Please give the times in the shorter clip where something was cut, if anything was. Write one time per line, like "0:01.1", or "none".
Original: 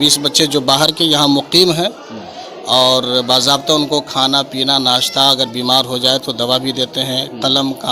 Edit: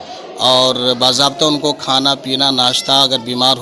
none

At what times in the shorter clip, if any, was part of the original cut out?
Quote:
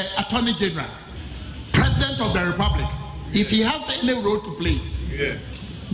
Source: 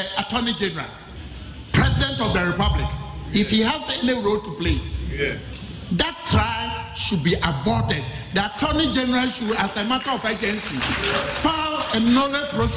none

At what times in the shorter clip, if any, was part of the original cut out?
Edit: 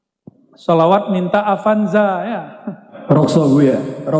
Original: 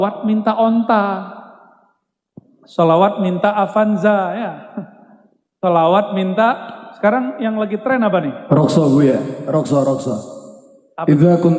0:02.9

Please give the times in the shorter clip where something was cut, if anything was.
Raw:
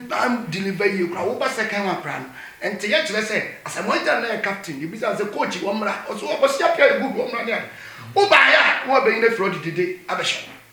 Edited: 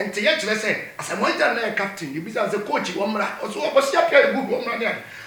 none

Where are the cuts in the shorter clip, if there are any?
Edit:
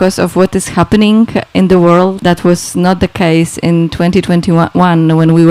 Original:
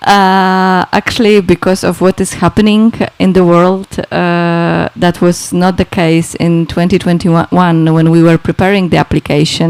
0:02.2

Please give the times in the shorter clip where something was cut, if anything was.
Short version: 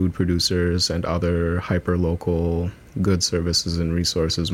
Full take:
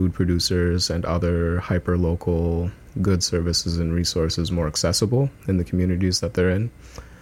none

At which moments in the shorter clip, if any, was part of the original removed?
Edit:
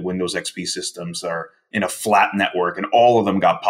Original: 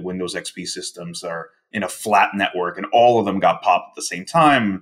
none

